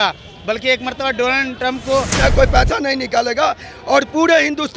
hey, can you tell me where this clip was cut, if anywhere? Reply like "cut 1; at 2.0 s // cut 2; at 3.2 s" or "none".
cut 1; at 2.1 s